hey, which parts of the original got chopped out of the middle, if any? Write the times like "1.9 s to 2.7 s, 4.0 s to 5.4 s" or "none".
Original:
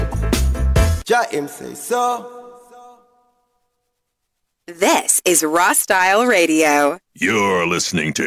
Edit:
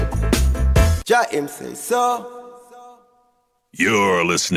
3.6 s to 7.1 s